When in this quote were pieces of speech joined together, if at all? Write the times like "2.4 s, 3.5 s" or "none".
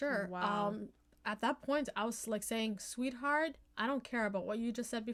none